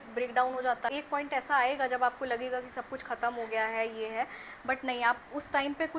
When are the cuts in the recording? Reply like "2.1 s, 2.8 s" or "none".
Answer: 0.9 s